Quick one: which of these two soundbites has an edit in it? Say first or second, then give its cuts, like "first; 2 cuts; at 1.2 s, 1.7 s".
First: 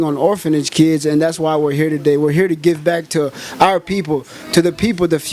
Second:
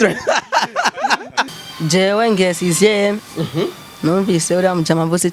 second; 1 cut; at 1.6 s